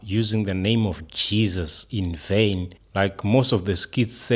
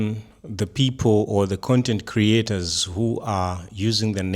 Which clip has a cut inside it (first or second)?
first